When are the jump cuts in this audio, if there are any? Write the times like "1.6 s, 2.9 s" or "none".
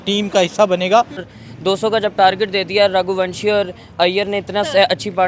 1.3 s

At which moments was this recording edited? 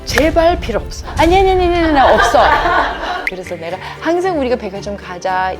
3.3 s

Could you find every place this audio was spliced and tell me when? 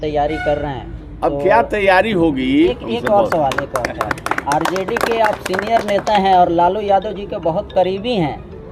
2.8 s

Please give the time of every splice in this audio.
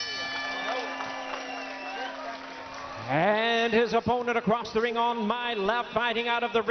1.2 s

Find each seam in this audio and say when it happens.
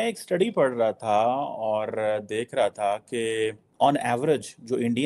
3.6 s

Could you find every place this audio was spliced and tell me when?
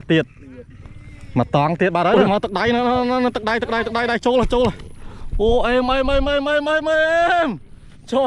2.1 s

